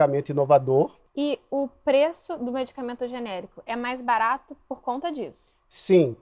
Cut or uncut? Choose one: cut